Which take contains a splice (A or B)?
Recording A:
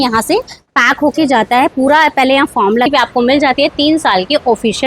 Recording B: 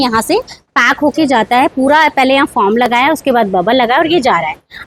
A